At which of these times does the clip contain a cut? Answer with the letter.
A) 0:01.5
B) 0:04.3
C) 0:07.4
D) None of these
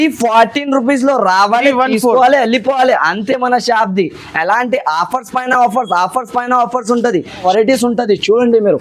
C